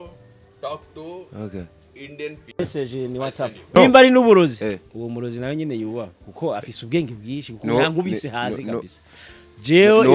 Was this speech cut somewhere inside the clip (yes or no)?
yes